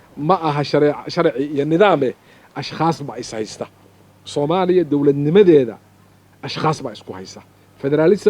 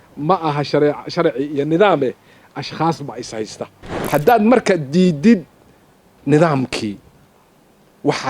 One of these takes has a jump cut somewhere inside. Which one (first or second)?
second